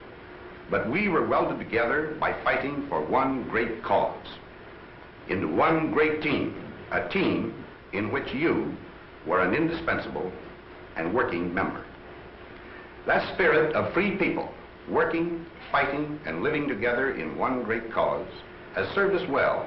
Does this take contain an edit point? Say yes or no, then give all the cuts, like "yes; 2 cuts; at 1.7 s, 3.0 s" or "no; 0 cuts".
no; 0 cuts